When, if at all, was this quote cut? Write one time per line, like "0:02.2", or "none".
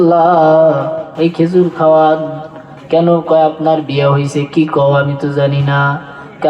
0:01.0